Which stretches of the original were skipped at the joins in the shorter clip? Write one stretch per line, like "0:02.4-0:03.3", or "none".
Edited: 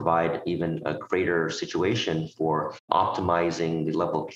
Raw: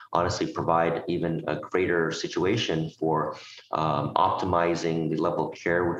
0:03.4-0:04.1